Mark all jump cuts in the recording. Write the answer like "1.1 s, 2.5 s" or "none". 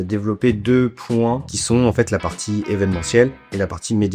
1.5 s